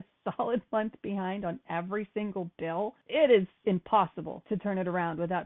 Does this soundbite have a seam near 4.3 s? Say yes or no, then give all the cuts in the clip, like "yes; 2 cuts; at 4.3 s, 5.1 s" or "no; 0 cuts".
yes; 2 cuts; at 3.0 s, 4.3 s